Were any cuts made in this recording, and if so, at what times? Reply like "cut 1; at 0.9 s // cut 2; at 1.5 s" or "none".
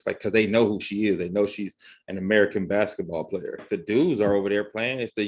cut 1; at 3.7 s